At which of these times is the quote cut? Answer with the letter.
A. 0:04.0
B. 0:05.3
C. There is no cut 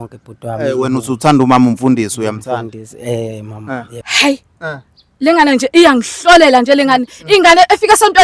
A